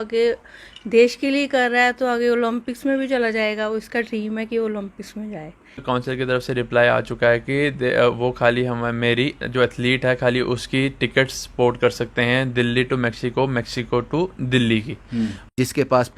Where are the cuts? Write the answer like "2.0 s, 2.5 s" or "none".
5.8 s, 15.5 s